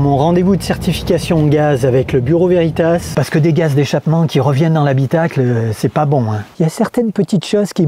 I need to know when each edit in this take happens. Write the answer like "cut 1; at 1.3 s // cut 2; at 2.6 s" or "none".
cut 1; at 3.1 s // cut 2; at 6.4 s